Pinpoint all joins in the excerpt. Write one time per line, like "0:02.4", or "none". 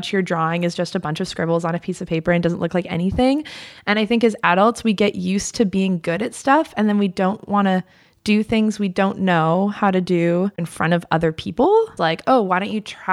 0:10.7
0:12.0